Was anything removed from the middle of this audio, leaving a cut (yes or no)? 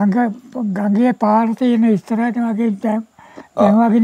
no